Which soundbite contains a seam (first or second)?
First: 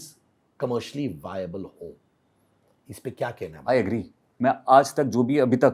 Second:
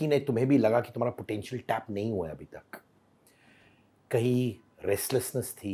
first